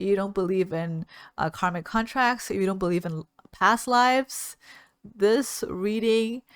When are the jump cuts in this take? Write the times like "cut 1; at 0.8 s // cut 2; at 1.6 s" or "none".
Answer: none